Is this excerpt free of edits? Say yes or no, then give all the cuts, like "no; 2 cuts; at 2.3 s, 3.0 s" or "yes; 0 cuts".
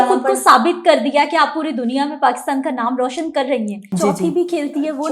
no; 1 cut; at 3.9 s